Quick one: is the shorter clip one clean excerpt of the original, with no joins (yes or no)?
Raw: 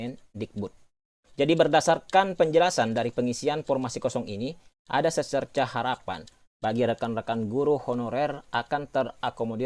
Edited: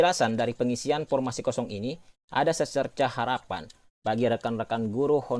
yes